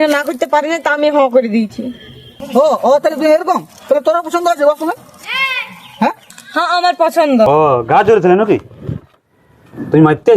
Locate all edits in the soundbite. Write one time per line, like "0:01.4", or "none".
0:07.5